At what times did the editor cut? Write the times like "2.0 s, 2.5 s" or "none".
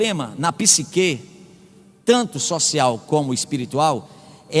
none